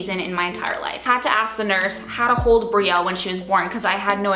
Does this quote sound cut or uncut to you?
cut